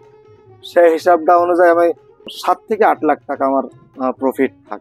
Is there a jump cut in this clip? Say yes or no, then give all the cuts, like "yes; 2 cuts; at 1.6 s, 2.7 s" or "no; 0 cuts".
yes; 2 cuts; at 2.3 s, 3.8 s